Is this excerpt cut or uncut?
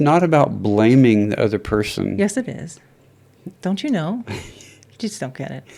uncut